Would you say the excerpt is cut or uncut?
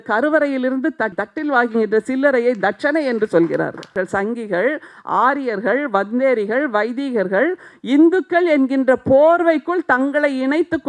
cut